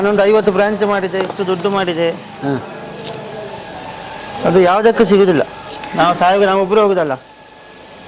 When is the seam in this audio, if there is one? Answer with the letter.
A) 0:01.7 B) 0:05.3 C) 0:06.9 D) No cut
D